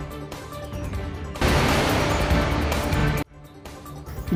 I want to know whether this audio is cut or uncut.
uncut